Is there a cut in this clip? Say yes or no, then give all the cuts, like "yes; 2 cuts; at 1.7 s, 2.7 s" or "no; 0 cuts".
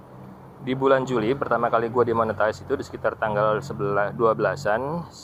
no; 0 cuts